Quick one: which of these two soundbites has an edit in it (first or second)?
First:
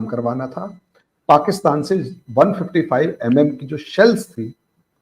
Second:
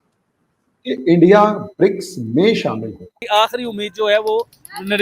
second